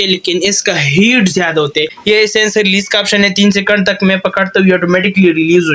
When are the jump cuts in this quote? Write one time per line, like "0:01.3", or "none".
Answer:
0:01.9